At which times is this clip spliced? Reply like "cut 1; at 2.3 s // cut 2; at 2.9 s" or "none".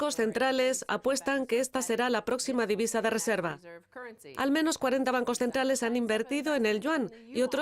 cut 1; at 4.3 s